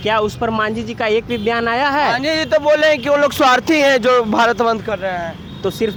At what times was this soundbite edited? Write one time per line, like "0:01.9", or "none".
none